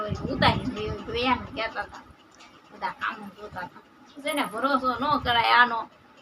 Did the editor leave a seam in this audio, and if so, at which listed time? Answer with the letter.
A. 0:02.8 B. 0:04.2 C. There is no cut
B